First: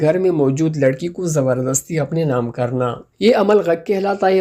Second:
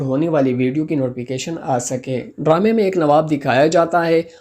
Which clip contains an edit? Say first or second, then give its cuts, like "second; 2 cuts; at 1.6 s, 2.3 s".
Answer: second; 1 cut; at 2.2 s